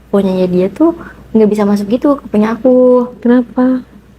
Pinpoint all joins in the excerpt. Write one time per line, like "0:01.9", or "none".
none